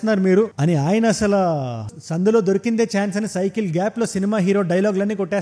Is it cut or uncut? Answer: uncut